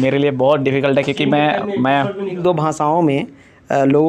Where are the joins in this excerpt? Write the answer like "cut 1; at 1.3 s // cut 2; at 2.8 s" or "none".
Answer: cut 1; at 2.4 s